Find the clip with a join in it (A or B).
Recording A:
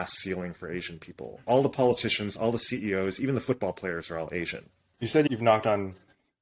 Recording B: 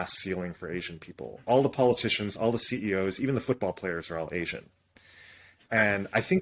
A